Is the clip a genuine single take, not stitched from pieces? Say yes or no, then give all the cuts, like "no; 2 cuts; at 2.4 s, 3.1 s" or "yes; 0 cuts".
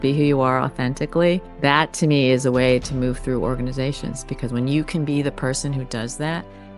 no; 1 cut; at 1.5 s